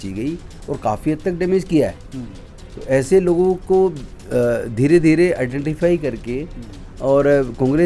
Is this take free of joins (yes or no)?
yes